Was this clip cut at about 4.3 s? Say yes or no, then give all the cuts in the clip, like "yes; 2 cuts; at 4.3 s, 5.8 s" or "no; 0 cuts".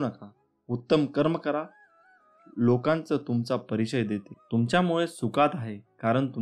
yes; 1 cut; at 4.3 s